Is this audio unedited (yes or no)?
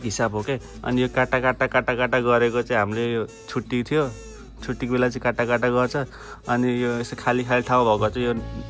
yes